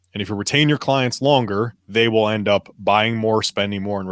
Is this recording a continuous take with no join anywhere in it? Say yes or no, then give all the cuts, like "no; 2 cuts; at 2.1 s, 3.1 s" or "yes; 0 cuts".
no; 1 cut; at 1.8 s